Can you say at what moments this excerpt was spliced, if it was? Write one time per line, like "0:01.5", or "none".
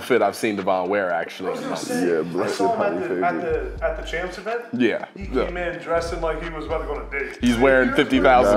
none